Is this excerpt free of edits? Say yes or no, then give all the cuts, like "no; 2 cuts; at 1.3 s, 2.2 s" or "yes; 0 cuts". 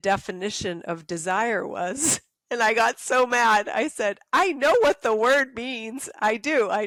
yes; 0 cuts